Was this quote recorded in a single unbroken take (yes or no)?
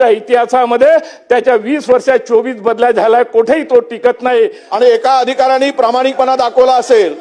no